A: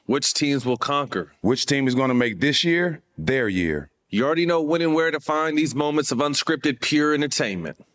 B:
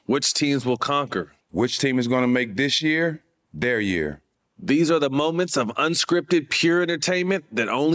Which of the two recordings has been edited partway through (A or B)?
A